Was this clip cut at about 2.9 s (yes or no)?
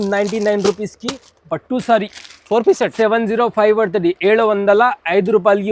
yes